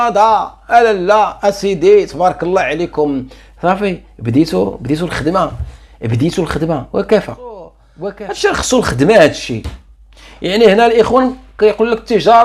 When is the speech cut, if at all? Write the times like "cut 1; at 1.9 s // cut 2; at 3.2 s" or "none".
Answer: cut 1; at 7.8 s